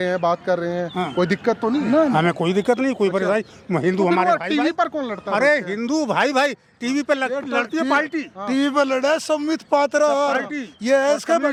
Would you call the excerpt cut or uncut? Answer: uncut